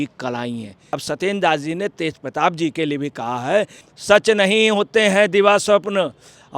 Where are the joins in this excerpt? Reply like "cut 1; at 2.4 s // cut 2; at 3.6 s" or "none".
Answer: cut 1; at 1.0 s // cut 2; at 3.8 s